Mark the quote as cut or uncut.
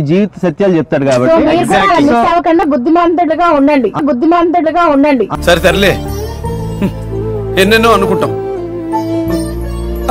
uncut